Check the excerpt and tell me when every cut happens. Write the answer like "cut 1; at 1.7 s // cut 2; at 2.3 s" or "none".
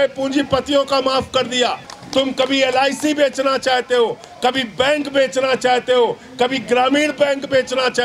cut 1; at 1.9 s